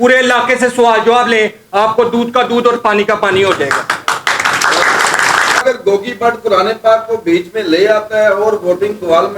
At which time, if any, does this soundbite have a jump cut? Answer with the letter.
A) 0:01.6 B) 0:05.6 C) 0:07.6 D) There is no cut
B